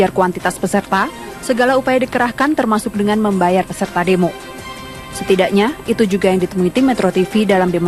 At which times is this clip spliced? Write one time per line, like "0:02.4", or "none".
none